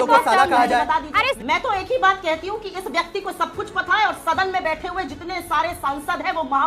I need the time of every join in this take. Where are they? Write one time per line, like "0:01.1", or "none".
0:01.3

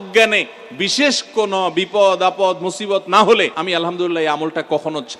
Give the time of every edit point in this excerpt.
0:03.6

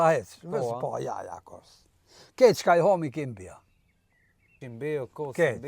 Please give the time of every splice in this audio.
0:04.6

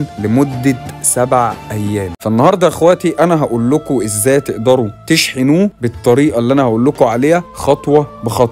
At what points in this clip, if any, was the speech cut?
0:02.2

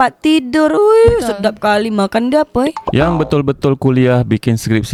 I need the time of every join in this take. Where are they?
none

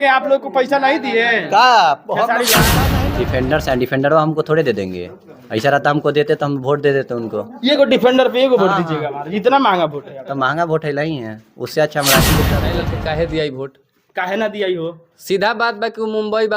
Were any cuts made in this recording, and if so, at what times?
0:02.7
0:12.4

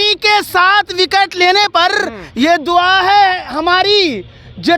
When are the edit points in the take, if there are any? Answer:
none

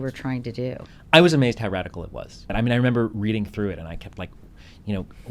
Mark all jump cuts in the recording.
0:02.5

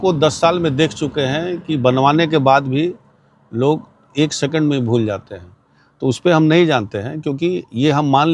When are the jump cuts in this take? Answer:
none

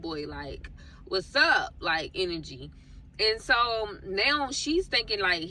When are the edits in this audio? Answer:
none

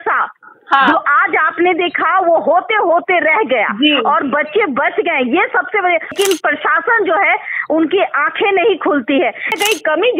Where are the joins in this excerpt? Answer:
0:06.1
0:09.5

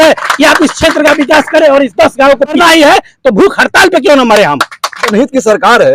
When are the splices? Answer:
0:02.6
0:05.1

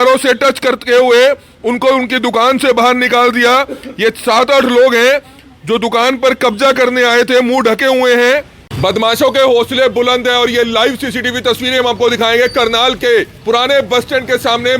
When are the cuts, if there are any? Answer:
0:08.8

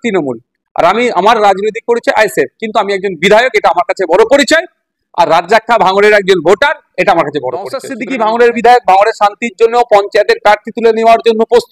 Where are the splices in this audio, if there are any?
0:08.0

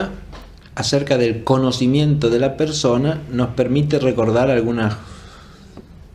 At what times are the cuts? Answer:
0:05.0

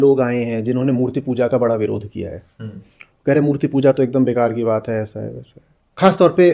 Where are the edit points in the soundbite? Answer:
none

